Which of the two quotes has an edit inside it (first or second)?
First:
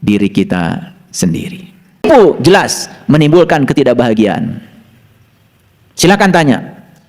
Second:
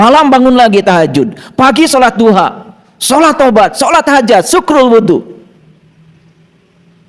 first